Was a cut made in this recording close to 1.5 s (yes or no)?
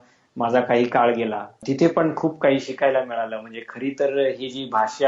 yes